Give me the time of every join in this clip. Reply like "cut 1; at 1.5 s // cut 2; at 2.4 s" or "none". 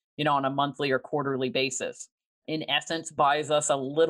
cut 1; at 2.5 s